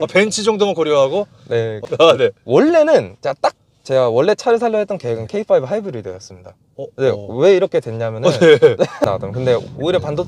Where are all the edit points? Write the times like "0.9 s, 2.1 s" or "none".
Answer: 1.9 s, 9.0 s